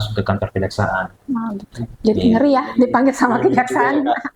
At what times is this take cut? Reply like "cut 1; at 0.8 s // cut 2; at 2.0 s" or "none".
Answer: none